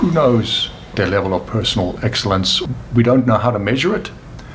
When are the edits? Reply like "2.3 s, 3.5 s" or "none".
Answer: 0.9 s, 2.6 s